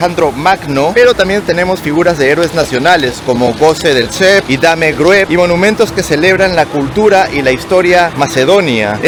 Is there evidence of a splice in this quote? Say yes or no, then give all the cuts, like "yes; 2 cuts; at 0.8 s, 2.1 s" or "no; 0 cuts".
no; 0 cuts